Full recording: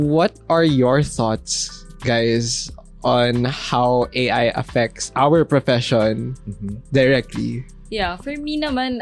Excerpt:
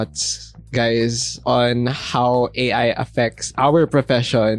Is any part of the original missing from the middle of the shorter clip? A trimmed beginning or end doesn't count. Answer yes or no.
yes